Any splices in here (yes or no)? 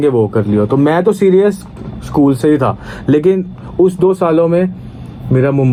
no